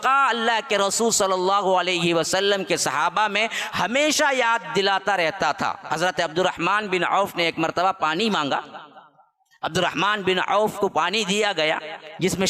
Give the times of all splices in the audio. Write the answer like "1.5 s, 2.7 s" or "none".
none